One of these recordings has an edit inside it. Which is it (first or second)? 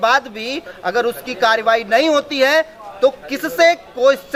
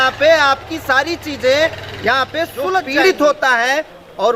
second